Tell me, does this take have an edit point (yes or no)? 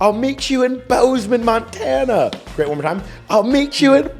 no